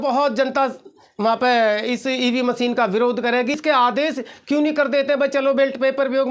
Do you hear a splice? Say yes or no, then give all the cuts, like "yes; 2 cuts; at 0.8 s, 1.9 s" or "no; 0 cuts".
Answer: yes; 1 cut; at 3.6 s